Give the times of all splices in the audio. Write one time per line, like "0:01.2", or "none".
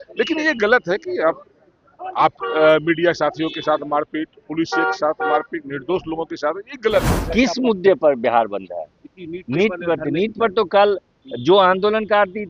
0:07.2